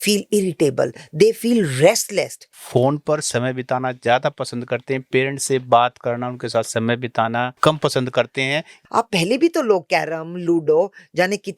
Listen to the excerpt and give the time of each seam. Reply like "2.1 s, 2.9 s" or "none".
2.5 s, 8.7 s